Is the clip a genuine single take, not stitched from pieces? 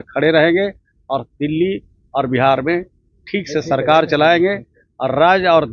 yes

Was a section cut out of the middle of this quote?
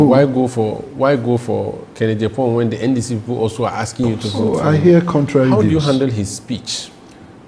yes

